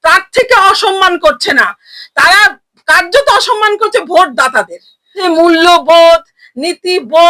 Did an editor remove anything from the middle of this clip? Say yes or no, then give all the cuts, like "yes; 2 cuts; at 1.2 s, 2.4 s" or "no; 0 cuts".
yes; 1 cut; at 5.2 s